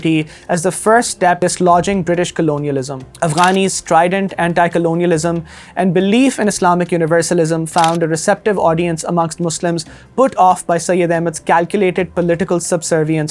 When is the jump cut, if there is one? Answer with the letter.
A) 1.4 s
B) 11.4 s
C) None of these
A